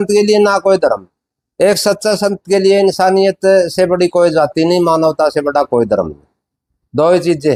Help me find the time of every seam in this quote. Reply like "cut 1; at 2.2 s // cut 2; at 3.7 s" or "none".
none